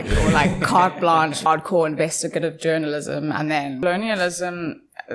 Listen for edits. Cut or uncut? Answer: cut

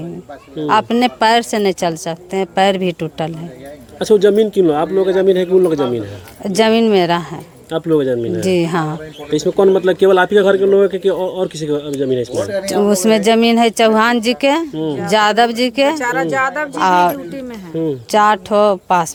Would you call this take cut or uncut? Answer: uncut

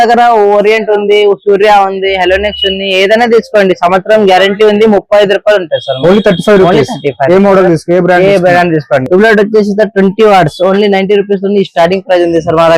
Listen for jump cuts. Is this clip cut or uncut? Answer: cut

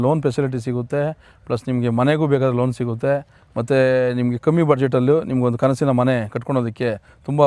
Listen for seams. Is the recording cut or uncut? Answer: uncut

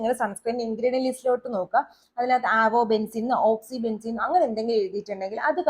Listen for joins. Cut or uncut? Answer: uncut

